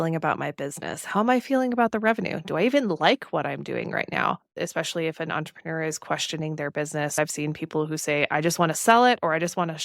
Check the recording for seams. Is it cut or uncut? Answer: cut